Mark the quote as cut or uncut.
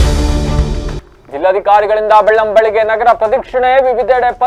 uncut